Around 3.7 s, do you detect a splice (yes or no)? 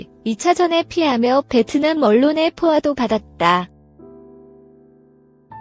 yes